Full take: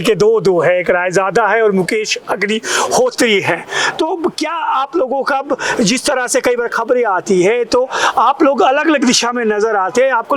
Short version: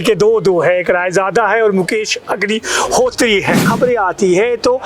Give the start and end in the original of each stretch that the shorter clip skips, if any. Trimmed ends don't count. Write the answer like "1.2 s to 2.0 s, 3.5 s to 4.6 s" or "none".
3.7 s to 6.7 s